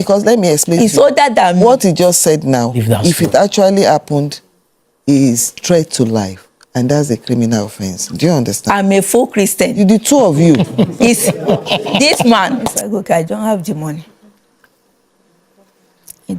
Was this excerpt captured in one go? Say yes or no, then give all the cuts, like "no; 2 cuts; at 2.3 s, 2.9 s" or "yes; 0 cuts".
no; 1 cut; at 12.7 s